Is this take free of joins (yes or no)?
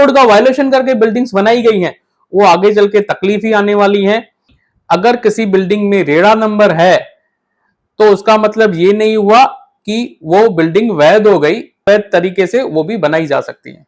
no